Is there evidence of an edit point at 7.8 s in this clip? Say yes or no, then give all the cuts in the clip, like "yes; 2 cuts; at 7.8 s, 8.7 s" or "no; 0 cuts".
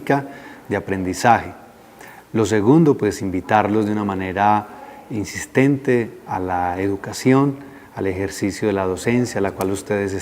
no; 1 cut; at 5.5 s